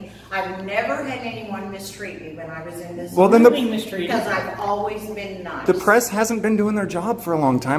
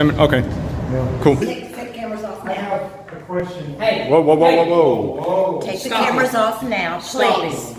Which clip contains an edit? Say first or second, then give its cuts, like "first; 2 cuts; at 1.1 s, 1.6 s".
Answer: second; 1 cut; at 1.4 s